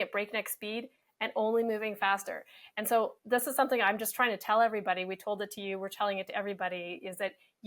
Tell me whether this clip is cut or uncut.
uncut